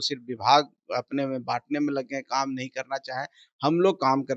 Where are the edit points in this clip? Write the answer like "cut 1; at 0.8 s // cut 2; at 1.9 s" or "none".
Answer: none

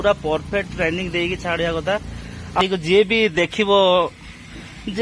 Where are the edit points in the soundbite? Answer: cut 1; at 2.6 s

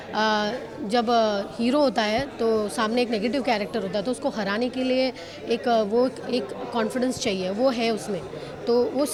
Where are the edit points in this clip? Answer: none

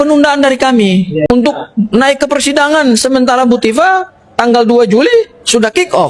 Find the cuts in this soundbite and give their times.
cut 1; at 1.3 s

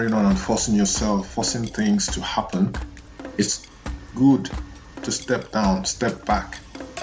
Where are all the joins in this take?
none

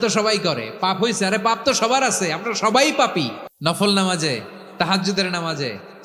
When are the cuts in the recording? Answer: cut 1; at 3.4 s

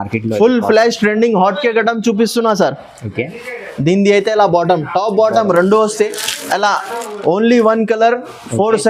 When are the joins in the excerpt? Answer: none

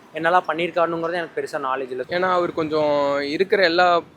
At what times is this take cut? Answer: cut 1; at 2.1 s

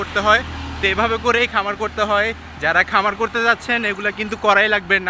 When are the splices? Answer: none

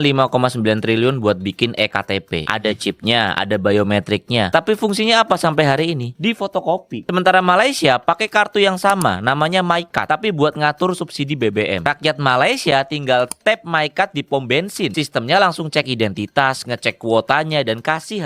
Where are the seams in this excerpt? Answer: none

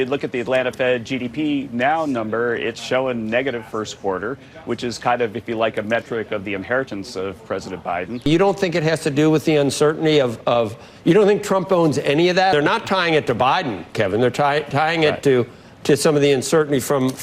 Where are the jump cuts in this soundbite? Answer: cut 1; at 8.3 s // cut 2; at 12.5 s

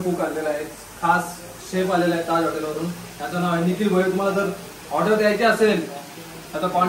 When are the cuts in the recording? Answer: none

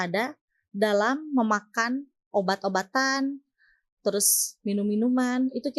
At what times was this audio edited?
none

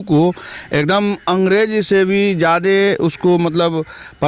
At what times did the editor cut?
none

